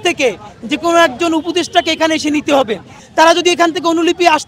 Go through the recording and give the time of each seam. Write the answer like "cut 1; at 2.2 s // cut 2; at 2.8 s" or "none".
cut 1; at 3.0 s